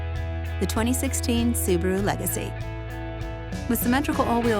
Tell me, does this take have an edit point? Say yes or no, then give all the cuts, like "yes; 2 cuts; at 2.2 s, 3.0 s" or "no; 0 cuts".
no; 0 cuts